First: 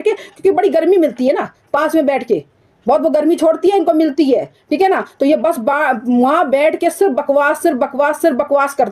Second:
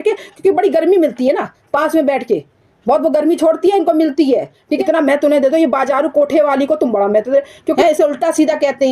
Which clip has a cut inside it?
second; 2 cuts; at 4.7 s, 7.8 s

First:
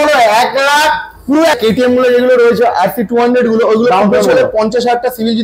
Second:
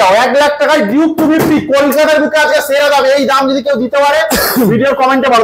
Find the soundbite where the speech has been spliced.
first; 1 cut; at 1.6 s

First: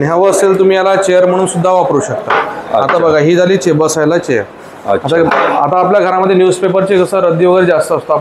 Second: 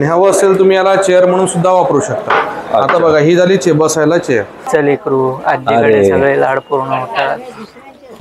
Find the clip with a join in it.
second; 1 cut; at 4.6 s

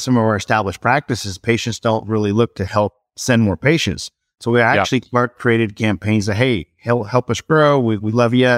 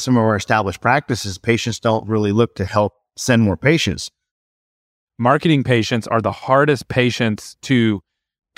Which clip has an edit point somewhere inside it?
second; 1 cut; at 4.5 s

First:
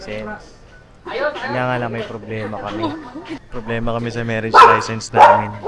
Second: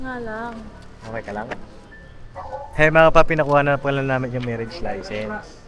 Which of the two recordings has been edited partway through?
first; 1 cut; at 3.2 s

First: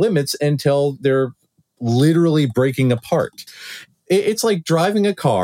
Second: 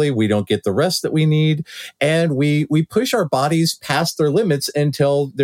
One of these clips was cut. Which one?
first; 1 cut; at 3.8 s

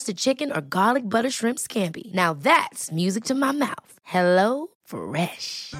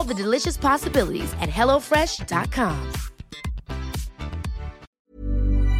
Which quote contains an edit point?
second; 1 cut; at 4.8 s

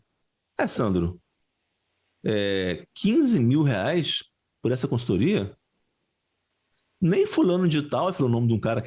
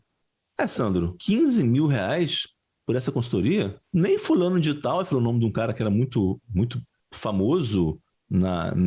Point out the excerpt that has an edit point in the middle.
second; 2 cuts; at 1.2 s, 3.8 s

